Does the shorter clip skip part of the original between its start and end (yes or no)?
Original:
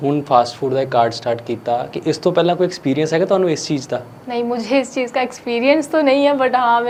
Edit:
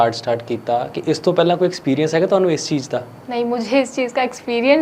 no